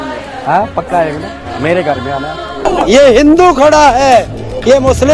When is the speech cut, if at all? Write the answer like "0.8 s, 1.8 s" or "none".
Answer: 2.7 s